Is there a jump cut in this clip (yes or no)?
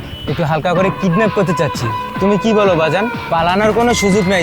yes